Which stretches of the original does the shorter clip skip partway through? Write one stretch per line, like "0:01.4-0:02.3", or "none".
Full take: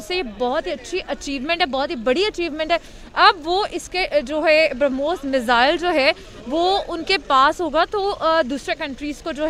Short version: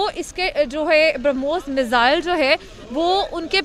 none